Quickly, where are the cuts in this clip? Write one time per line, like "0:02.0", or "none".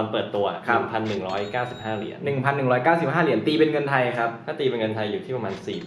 none